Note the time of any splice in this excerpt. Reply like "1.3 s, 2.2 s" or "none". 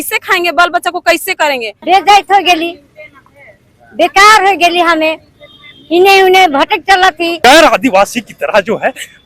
1.7 s, 7.4 s